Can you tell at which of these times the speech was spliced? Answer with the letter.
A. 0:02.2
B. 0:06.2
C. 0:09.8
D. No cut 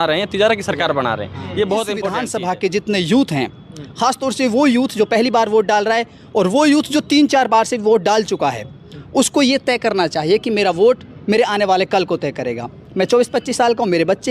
A